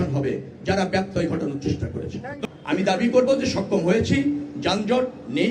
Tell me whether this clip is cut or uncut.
cut